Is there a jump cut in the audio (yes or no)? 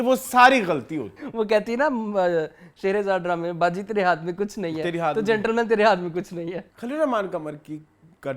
yes